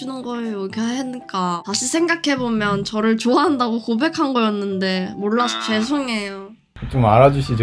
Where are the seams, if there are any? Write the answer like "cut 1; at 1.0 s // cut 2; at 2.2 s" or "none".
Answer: none